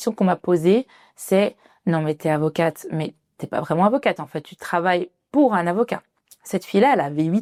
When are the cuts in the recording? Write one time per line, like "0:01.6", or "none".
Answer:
none